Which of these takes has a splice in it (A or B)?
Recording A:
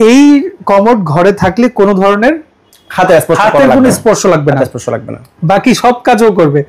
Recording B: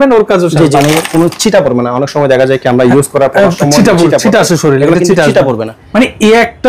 B